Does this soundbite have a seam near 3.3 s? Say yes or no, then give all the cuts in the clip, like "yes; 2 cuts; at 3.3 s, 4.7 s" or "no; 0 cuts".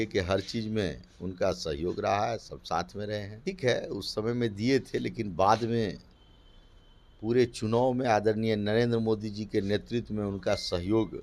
yes; 1 cut; at 3.3 s